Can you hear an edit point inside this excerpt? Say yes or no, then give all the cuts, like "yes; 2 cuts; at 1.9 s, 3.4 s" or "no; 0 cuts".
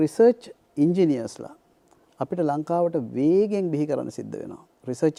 no; 0 cuts